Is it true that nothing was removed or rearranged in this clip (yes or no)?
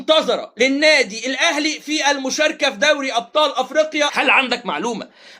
no